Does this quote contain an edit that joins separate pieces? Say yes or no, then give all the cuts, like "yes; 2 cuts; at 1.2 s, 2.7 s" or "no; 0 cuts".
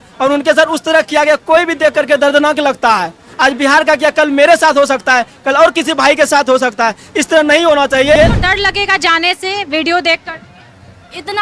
yes; 1 cut; at 8.2 s